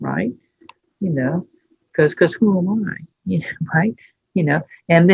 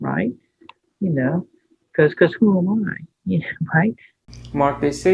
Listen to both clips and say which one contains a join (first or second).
second